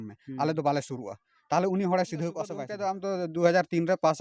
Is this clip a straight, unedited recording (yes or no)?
no